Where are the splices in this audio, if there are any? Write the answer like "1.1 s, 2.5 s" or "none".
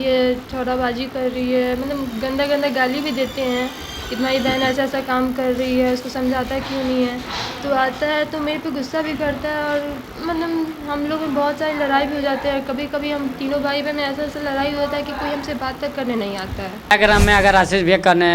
16.9 s